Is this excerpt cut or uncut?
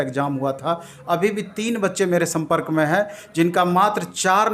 uncut